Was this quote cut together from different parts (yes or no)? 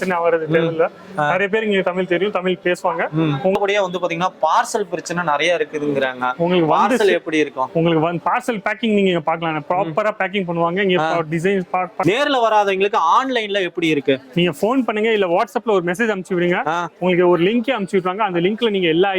yes